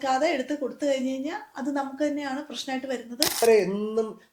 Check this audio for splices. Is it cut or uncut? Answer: cut